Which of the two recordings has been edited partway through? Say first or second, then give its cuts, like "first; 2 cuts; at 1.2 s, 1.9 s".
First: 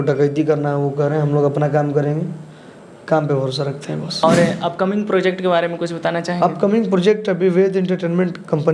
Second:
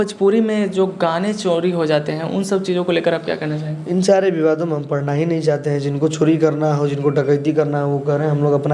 first; 1 cut; at 4.2 s